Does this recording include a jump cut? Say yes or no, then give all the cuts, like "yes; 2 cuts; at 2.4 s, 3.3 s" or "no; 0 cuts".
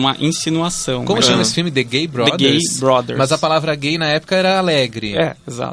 no; 0 cuts